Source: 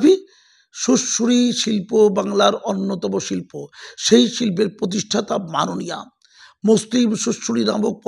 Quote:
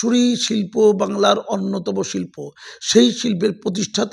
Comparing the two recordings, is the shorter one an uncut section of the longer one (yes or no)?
yes